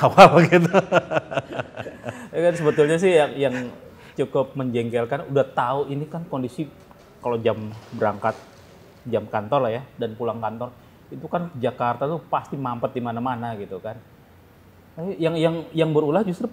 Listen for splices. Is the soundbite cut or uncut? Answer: uncut